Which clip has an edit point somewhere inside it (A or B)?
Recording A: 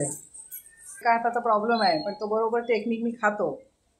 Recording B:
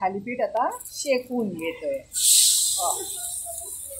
A